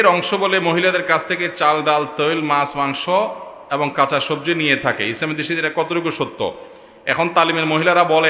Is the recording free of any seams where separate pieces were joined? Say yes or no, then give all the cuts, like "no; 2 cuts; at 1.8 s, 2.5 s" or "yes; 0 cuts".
yes; 0 cuts